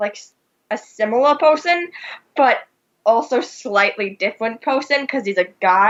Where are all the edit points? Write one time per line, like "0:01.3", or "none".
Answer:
none